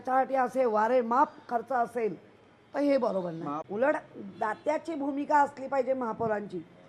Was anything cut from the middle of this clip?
yes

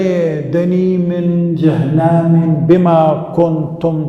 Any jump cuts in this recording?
no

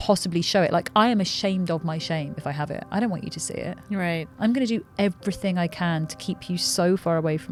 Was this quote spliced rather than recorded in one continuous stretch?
no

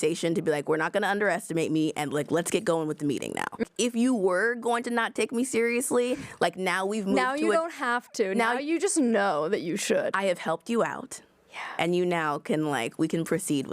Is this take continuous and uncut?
no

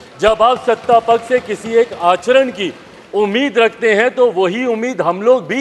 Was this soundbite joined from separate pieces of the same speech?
no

